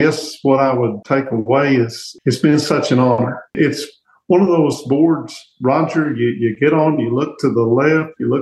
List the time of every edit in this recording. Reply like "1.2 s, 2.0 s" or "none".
1.0 s, 2.0 s, 3.6 s